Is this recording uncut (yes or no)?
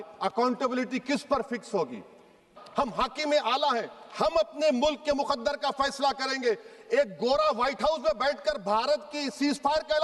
no